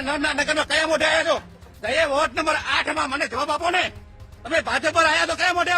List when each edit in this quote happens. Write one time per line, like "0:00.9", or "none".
none